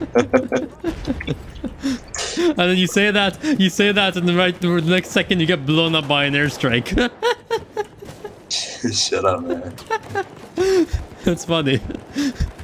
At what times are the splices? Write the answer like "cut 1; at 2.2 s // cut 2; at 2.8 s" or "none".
none